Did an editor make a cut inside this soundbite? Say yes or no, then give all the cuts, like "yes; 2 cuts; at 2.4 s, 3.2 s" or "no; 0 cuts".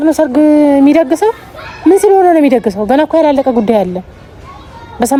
no; 0 cuts